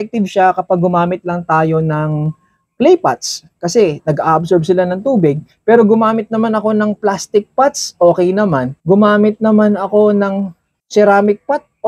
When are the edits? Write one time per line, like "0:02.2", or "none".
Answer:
none